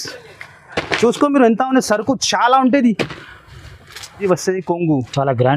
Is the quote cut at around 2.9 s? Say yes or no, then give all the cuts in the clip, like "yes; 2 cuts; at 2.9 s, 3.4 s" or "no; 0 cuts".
no; 1 cut; at 4.2 s